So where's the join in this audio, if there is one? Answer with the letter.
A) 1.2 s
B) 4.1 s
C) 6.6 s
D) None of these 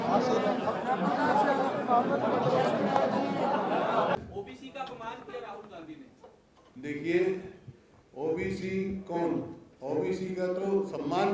B